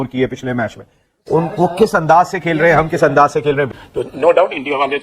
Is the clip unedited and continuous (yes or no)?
no